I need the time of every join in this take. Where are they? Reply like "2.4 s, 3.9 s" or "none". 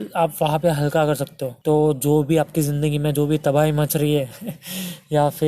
1.5 s